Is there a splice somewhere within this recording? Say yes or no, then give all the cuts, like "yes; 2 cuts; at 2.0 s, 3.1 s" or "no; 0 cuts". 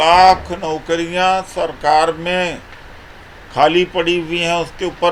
no; 0 cuts